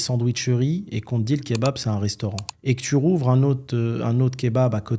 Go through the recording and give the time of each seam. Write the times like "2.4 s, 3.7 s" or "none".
2.5 s